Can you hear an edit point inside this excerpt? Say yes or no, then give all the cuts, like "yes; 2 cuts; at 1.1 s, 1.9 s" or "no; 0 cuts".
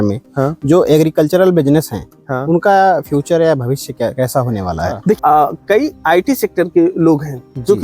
yes; 1 cut; at 5.2 s